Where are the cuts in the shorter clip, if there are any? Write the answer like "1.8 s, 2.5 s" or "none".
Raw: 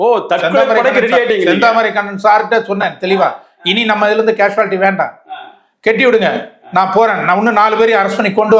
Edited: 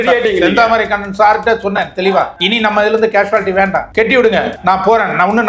2.4 s, 3.9 s, 4.5 s